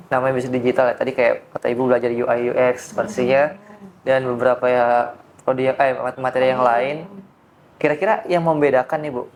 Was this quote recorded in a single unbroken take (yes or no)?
yes